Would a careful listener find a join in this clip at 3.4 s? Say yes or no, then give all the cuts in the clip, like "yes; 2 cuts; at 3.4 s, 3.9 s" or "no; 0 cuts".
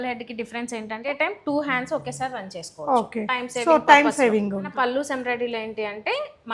no; 2 cuts; at 1.1 s, 4.7 s